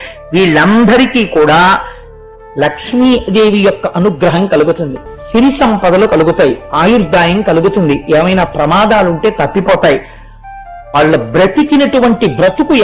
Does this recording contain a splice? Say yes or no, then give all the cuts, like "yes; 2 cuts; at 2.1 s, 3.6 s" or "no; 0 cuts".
no; 0 cuts